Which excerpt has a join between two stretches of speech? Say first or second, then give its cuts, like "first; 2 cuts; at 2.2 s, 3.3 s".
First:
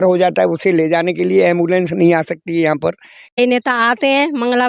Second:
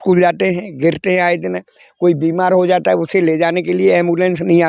first; 1 cut; at 3.4 s